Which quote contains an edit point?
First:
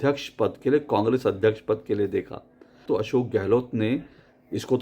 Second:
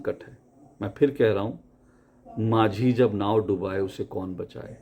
first; 1 cut; at 2.8 s

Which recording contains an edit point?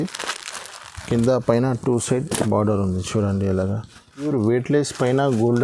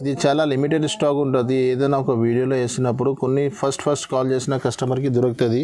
first; 1 cut; at 4.2 s

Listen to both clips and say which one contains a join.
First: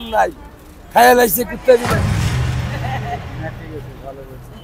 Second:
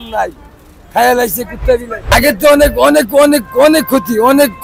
second; 1 cut; at 2.1 s

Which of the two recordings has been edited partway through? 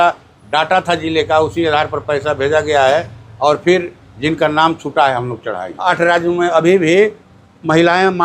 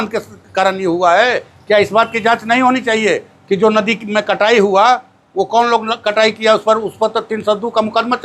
first; 1 cut; at 5.6 s

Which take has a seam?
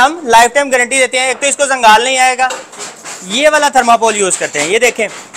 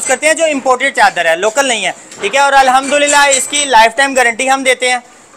first; 1 cut; at 2.7 s

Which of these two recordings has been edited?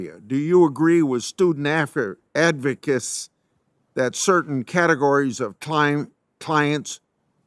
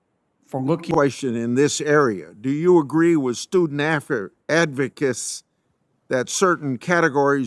second; 1 cut; at 0.9 s

